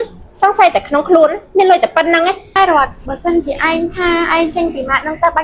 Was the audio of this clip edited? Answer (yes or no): yes